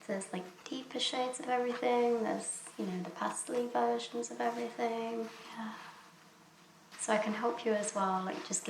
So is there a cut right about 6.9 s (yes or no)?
yes